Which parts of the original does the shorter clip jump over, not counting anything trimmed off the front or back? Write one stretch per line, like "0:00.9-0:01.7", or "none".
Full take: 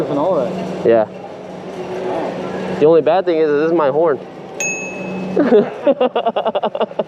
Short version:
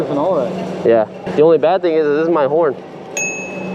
0:01.2-0:02.6